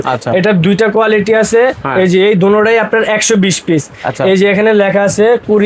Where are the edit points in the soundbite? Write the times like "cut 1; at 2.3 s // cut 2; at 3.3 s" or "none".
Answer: none